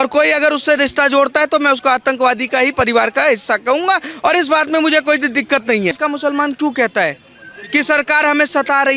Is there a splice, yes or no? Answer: yes